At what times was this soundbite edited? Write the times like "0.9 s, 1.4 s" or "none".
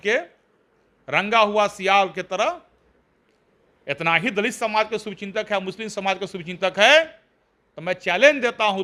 none

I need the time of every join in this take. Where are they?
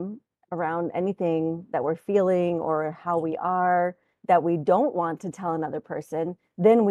none

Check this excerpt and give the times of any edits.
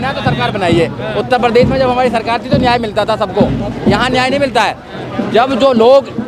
none

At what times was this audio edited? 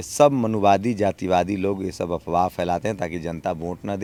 none

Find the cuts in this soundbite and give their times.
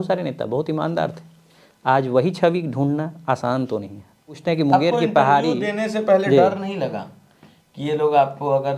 4.3 s

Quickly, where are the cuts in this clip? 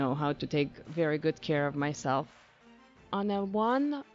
2.8 s

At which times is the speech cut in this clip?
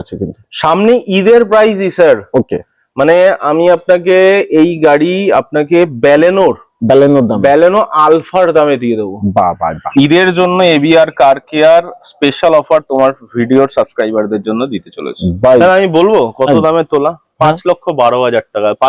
9.9 s, 15.6 s

